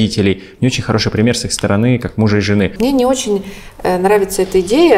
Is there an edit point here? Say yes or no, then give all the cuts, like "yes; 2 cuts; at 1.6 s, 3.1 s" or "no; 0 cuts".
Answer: yes; 1 cut; at 2.8 s